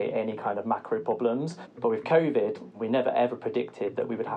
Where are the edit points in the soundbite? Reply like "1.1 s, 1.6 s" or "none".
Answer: 1.6 s, 2.7 s